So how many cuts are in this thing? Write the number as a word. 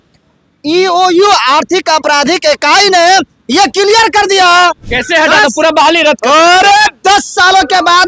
one